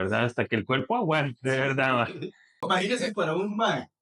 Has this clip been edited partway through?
yes; 1 cut; at 2.6 s

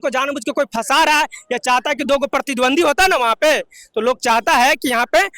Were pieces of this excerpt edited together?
no; 0 cuts

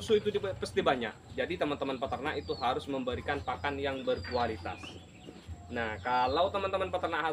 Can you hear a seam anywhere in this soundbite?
yes; 1 cut; at 1.2 s

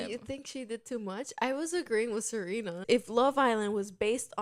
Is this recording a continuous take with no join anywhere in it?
no; 1 cut; at 2.8 s

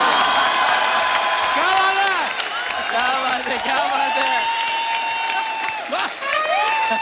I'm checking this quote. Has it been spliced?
no; 0 cuts

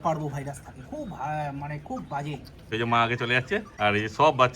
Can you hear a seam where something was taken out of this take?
yes; 2 cuts; at 2.7 s, 3.7 s

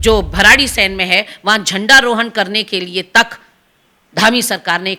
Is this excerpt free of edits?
yes; 0 cuts

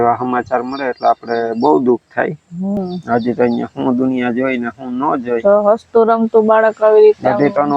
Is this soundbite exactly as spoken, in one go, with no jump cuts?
no; 1 cut; at 2.8 s

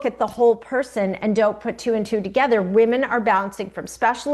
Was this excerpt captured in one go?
yes; 0 cuts

